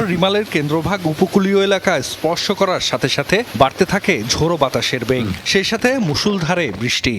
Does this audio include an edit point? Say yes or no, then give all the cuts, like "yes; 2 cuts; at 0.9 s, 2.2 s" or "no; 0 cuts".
no; 0 cuts